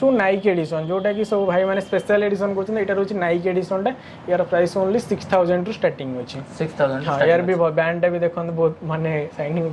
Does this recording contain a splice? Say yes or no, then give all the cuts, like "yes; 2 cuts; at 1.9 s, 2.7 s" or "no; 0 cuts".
no; 0 cuts